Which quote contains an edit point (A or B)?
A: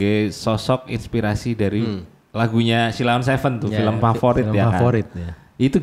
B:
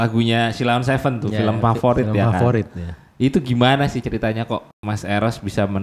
B